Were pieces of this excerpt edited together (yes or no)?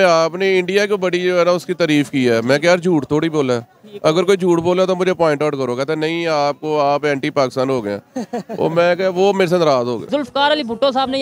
yes